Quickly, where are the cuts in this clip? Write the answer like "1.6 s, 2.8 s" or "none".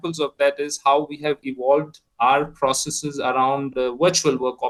none